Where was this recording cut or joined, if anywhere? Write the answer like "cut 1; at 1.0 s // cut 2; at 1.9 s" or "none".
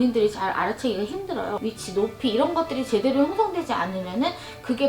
cut 1; at 1.6 s